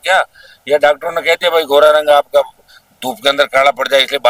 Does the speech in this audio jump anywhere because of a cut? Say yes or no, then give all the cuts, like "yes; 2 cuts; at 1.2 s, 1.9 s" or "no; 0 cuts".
no; 0 cuts